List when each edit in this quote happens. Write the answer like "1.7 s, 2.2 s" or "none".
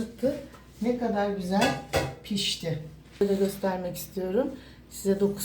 3.2 s